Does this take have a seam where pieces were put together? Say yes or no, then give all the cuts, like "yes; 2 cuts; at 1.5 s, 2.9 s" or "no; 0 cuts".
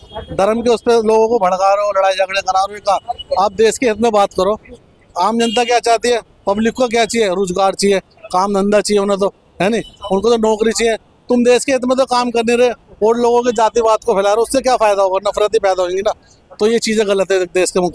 no; 0 cuts